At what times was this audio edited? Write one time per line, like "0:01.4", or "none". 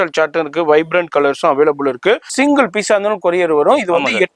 0:02.3